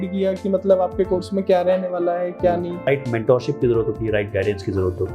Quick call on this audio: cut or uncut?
cut